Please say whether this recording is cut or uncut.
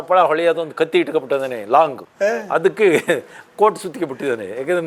cut